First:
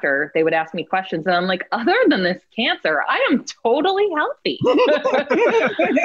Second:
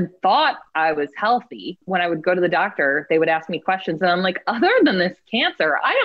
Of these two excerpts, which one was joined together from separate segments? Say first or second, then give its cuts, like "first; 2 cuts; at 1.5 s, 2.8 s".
second; 1 cut; at 1.8 s